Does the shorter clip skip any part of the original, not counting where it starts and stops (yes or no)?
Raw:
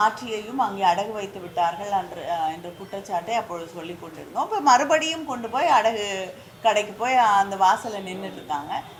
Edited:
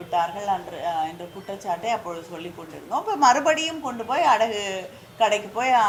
no